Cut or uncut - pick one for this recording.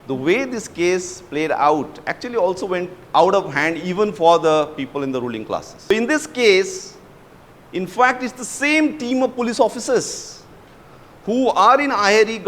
cut